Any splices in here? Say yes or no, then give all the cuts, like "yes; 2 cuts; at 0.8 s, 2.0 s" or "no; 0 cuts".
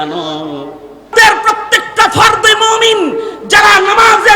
yes; 1 cut; at 1.1 s